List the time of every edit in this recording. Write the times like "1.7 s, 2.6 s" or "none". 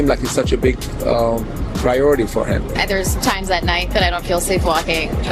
none